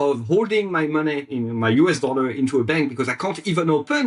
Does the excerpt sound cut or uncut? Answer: uncut